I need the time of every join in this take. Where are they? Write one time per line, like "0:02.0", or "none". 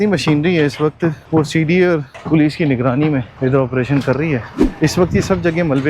0:01.2
0:02.1
0:03.3
0:04.6